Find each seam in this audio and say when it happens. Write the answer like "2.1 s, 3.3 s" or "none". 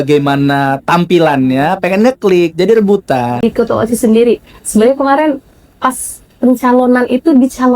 3.4 s